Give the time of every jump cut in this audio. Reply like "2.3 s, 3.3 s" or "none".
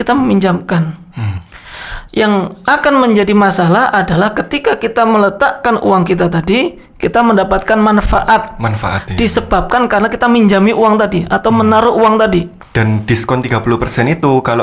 12.6 s